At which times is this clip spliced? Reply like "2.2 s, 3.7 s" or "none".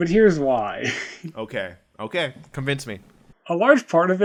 none